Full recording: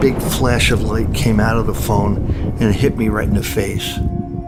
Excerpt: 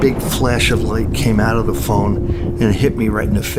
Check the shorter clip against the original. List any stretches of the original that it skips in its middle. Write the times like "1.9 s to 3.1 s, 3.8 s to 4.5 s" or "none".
none